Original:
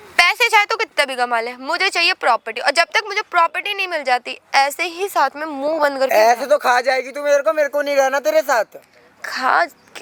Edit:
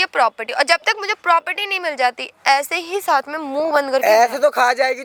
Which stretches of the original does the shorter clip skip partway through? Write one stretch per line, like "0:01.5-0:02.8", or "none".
none